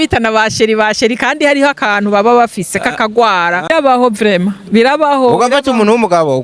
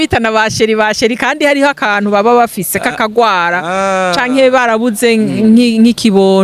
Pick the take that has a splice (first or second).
first